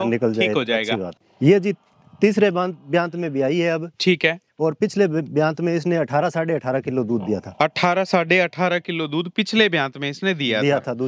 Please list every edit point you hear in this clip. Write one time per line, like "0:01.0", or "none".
0:01.2